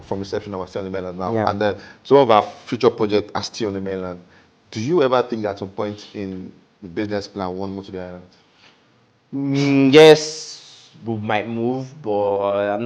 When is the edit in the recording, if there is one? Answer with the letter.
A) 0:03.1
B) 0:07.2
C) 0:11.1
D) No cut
D